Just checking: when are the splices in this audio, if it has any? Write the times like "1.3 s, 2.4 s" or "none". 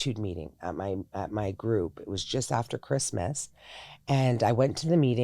none